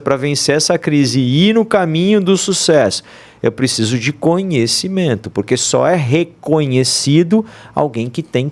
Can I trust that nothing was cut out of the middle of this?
yes; 0 cuts

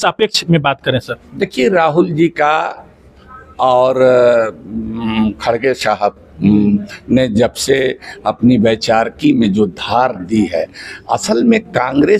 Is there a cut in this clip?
no; 0 cuts

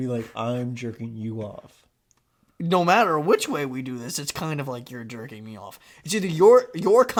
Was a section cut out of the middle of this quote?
no; 0 cuts

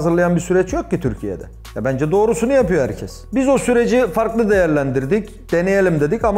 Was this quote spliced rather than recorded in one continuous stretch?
no; 0 cuts

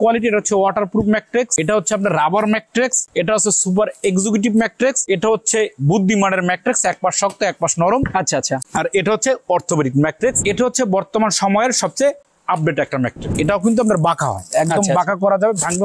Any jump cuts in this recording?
yes; 6 cuts; at 1.5 s, 3.1 s, 5.0 s, 8.6 s, 10.4 s, 13.3 s

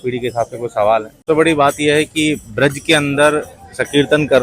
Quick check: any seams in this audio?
yes; 1 cut; at 1.2 s

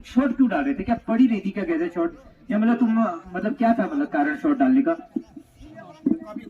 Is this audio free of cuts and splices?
yes; 0 cuts

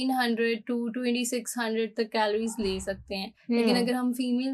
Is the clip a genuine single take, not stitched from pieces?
yes; 0 cuts

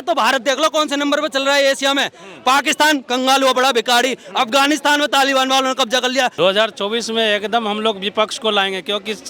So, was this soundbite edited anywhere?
yes; 1 cut; at 6.3 s

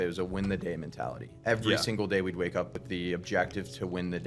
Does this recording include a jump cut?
yes; 1 cut; at 2.8 s

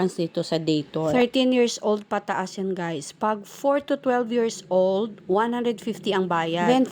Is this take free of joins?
yes; 0 cuts

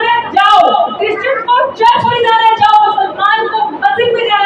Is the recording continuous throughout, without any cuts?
yes; 0 cuts

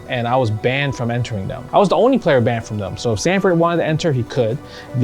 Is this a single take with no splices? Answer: no; 1 cut; at 1.5 s

